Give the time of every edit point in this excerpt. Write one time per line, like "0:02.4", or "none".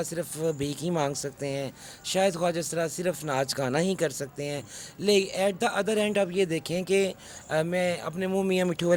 none